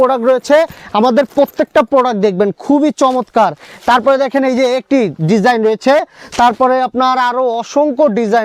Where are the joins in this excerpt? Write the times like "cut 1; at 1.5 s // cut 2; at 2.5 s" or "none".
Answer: none